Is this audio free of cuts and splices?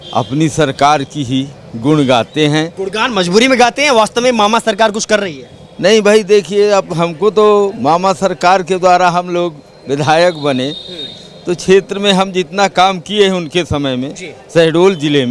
no; 1 cut; at 2.8 s

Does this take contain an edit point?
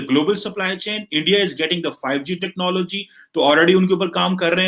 no; 0 cuts

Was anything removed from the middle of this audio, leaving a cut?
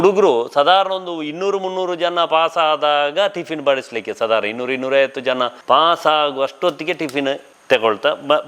yes; 2 cuts; at 5.6 s, 7.5 s

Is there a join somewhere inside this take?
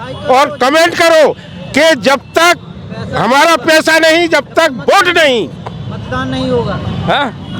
no; 0 cuts

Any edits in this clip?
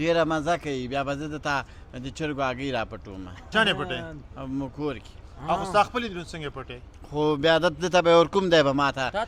no; 0 cuts

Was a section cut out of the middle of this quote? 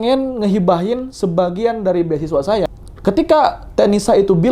yes; 1 cut; at 2.7 s

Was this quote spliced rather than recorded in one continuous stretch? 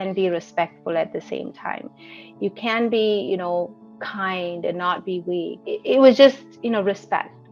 yes; 1 cut; at 5.6 s

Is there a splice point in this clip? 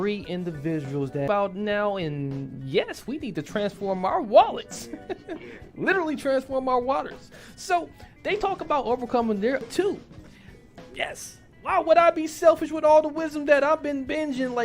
yes; 2 cuts; at 1.3 s, 9.6 s

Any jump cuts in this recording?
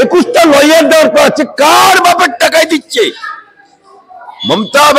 no; 0 cuts

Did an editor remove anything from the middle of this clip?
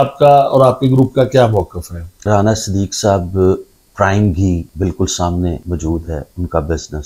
yes; 3 cuts; at 2.2 s, 4.7 s, 5.6 s

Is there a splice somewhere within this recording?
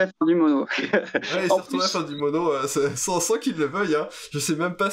no; 0 cuts

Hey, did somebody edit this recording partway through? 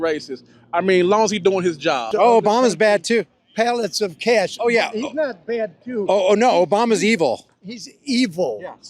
yes; 1 cut; at 2.1 s

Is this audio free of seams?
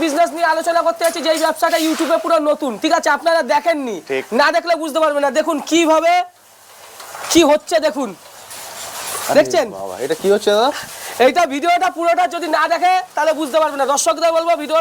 yes; 0 cuts

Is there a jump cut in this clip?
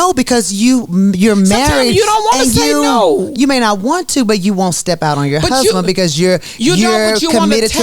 no; 0 cuts

